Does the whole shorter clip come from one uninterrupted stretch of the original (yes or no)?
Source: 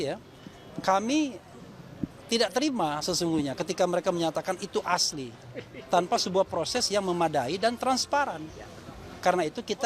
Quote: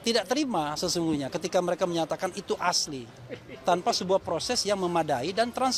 yes